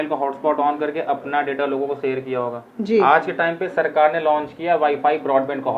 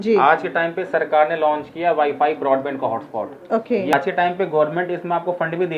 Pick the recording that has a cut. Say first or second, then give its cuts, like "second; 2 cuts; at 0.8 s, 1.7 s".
second; 1 cut; at 3.9 s